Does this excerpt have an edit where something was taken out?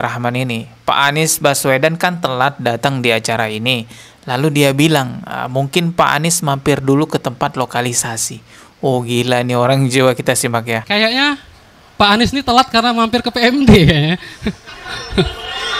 yes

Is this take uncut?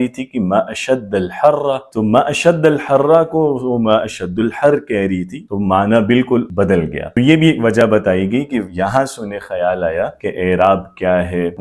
yes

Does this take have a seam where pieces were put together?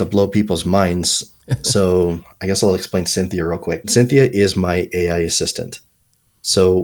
yes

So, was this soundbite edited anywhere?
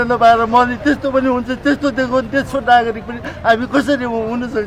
no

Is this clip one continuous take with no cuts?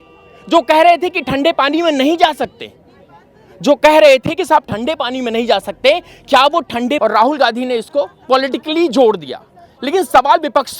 no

